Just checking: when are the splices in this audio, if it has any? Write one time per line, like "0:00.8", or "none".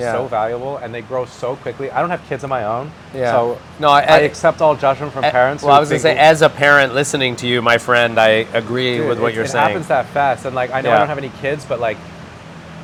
none